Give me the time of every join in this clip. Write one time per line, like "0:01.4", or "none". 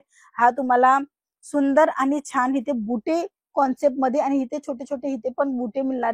none